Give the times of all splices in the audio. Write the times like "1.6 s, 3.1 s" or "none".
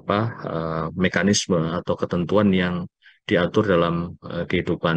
none